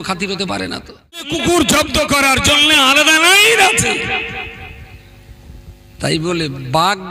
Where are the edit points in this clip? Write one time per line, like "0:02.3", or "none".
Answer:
0:01.3